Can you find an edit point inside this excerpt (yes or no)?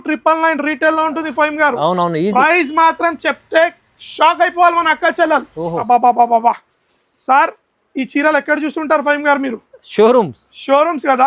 yes